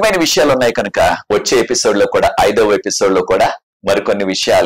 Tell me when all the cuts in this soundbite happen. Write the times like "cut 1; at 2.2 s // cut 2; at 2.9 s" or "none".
cut 1; at 3.7 s